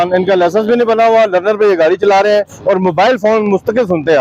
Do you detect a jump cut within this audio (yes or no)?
no